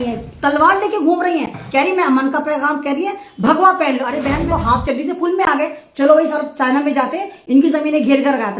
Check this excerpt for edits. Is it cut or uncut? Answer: cut